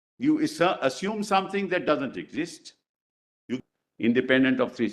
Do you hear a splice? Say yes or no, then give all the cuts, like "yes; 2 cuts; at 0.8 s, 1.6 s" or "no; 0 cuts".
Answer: yes; 1 cut; at 3.6 s